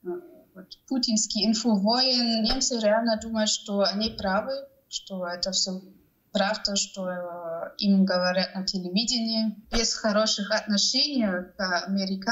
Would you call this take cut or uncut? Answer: cut